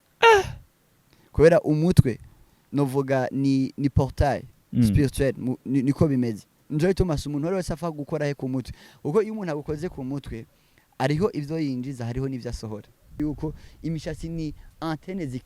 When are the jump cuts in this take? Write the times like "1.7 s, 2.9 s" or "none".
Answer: 13.2 s